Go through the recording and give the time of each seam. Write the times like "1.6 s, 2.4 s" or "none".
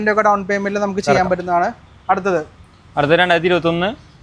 none